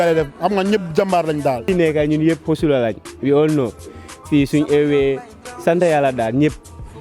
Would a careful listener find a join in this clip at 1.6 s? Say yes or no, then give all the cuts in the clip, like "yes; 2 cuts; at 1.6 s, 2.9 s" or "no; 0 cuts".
yes; 1 cut; at 1.6 s